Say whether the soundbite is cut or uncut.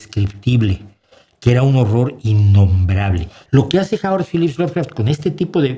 cut